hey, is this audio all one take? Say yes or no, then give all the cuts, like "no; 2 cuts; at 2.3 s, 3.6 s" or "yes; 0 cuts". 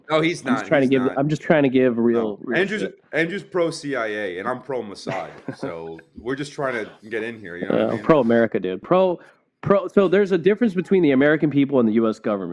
yes; 0 cuts